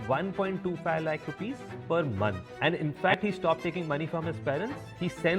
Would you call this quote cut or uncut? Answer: cut